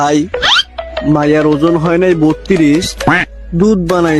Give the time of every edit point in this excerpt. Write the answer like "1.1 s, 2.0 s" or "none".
none